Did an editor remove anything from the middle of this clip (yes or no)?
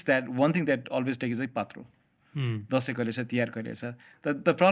no